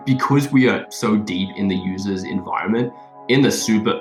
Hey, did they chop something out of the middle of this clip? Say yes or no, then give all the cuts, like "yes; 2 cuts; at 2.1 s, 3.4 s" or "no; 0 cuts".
no; 0 cuts